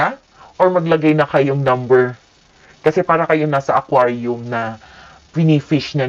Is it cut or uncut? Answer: uncut